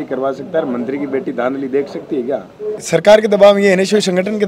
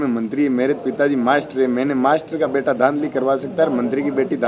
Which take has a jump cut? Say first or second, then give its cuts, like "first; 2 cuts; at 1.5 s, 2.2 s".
first; 1 cut; at 2.8 s